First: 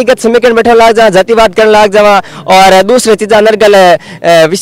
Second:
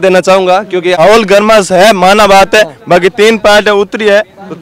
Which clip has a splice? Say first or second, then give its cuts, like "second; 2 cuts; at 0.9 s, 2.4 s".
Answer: second; 1 cut; at 0.9 s